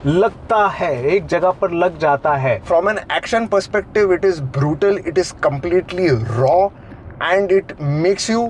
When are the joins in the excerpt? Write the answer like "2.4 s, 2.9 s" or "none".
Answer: 2.7 s

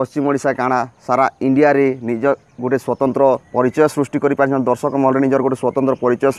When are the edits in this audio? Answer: 3.5 s

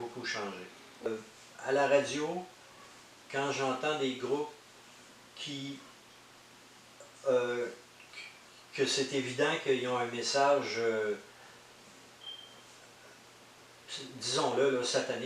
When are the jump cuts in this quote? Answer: 1.1 s

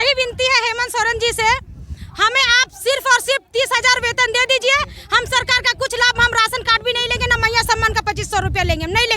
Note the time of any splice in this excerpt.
none

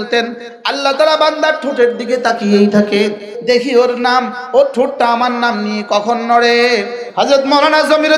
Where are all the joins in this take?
3.3 s, 7.0 s

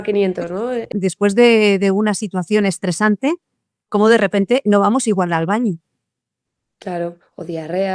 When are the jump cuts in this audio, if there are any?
0.9 s

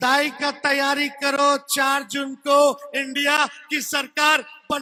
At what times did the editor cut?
none

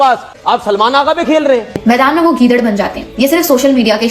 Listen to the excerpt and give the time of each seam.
1.7 s

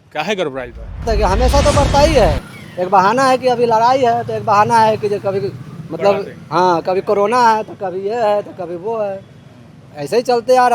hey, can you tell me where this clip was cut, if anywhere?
1.0 s

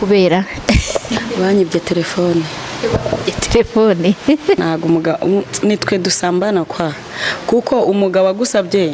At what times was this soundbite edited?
4.6 s

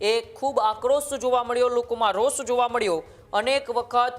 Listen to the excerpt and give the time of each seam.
none

